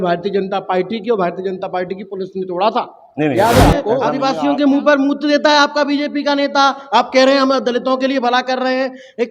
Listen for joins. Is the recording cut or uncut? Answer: cut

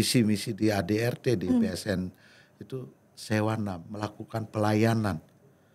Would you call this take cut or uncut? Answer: uncut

